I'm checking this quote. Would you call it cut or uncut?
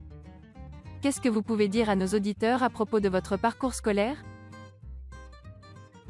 cut